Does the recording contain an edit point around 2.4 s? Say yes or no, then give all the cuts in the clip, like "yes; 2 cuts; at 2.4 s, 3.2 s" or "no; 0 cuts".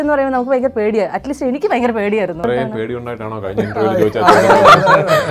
yes; 1 cut; at 2.4 s